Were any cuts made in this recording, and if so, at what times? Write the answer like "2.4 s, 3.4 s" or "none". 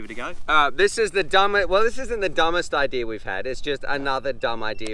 none